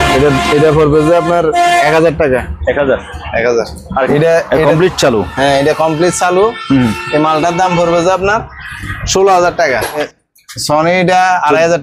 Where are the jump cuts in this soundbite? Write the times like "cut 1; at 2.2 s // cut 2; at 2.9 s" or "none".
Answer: cut 1; at 4.1 s // cut 2; at 10.1 s